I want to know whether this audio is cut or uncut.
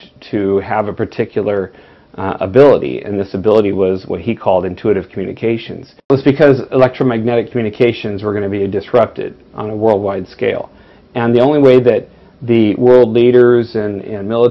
cut